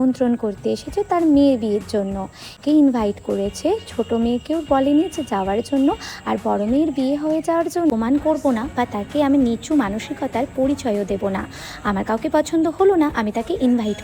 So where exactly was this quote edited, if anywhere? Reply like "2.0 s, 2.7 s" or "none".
2.6 s, 7.9 s